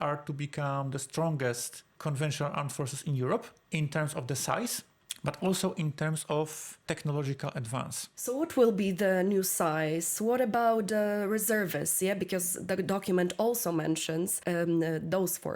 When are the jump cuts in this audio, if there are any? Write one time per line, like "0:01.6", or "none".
none